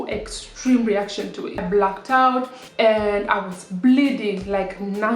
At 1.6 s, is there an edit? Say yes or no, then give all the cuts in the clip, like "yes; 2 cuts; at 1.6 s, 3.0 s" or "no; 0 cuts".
yes; 2 cuts; at 1.6 s, 2.6 s